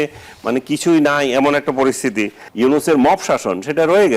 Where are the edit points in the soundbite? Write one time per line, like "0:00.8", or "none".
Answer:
0:02.4